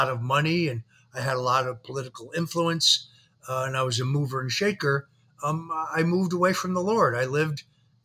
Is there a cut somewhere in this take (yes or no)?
no